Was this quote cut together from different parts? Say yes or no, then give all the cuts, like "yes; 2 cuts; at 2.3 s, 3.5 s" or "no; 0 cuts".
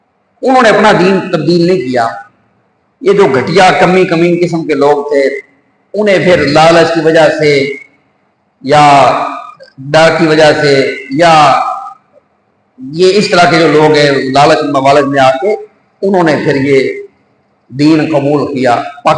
no; 0 cuts